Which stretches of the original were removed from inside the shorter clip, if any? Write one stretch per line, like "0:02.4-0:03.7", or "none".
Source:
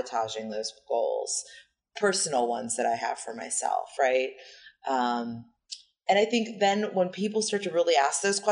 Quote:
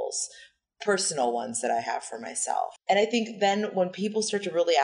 0:03.9-0:05.9